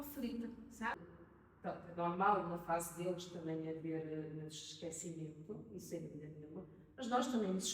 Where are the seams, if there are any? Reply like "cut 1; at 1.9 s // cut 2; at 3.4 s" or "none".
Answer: cut 1; at 1.0 s